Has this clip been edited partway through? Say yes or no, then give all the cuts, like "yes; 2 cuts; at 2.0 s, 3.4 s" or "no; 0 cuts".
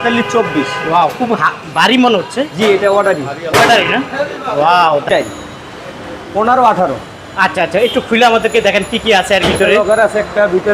yes; 1 cut; at 5.0 s